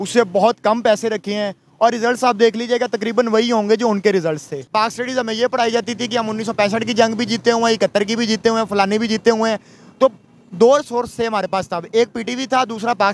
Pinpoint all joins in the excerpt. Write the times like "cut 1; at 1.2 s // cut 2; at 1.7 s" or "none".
cut 1; at 4.6 s